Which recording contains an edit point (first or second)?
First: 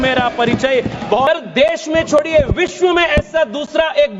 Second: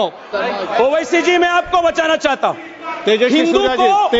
first